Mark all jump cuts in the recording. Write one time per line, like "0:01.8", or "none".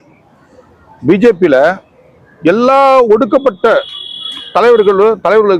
none